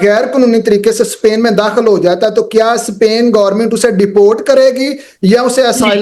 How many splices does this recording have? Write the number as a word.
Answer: zero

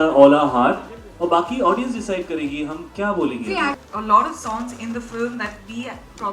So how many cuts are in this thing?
one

